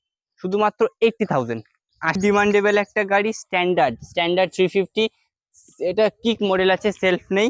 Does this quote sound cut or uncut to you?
cut